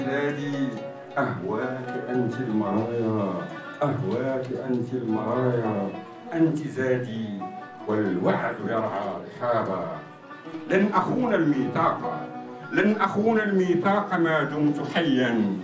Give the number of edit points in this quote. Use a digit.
2